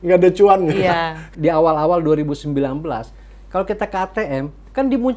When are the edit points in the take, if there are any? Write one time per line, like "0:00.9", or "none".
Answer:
0:01.2